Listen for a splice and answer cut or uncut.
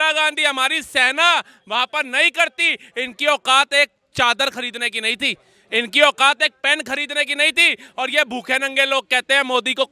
uncut